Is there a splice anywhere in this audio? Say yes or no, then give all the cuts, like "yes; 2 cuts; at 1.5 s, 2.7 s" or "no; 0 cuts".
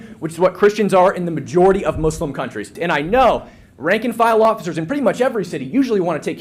yes; 1 cut; at 2.7 s